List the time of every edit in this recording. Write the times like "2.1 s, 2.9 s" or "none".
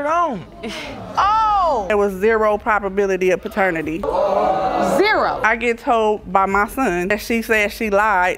1.9 s, 5.4 s